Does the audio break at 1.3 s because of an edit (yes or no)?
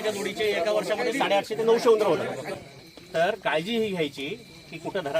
no